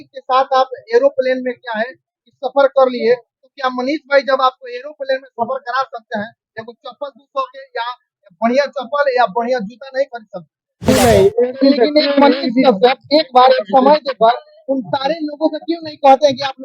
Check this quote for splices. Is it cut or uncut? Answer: cut